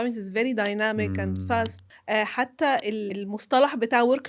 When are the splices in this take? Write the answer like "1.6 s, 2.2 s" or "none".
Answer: 1.9 s, 3.1 s